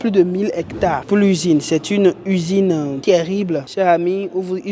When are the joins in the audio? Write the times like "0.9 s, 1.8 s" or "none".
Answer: none

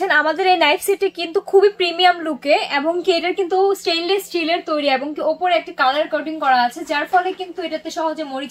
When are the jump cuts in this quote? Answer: none

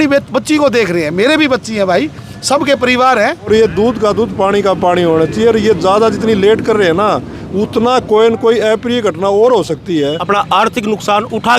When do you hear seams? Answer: 3.5 s, 10.2 s

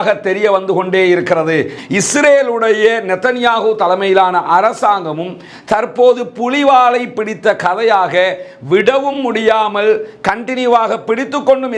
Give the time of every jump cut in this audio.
1.8 s

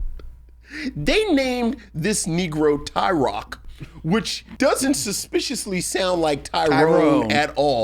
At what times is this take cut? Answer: 4.4 s

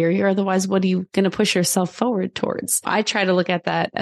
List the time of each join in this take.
1.1 s, 2.9 s

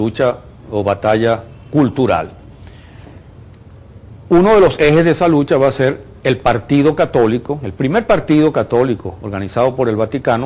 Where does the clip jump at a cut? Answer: 1.3 s

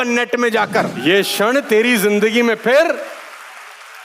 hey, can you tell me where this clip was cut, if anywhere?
0.9 s

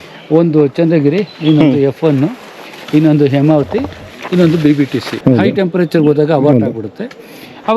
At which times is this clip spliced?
5.1 s

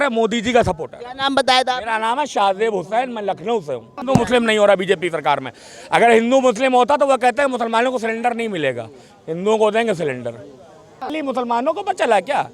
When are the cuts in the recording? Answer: 4.1 s, 11.2 s

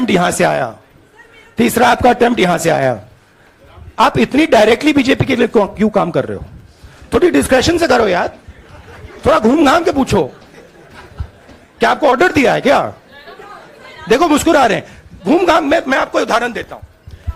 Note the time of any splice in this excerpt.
none

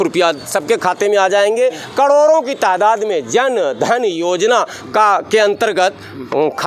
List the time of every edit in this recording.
none

